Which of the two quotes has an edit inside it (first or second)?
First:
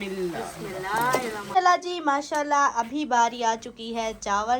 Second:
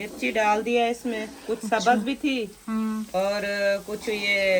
first